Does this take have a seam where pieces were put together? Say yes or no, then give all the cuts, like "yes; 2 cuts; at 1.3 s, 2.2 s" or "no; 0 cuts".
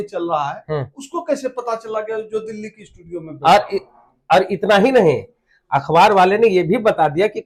no; 0 cuts